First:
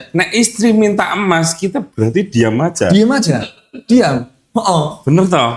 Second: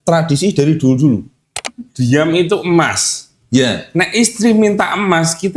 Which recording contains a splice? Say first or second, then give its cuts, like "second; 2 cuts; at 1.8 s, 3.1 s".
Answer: second; 1 cut; at 1.6 s